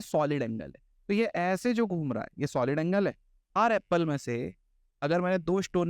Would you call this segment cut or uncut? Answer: cut